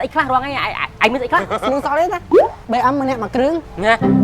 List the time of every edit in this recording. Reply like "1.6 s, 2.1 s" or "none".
1.6 s, 2.6 s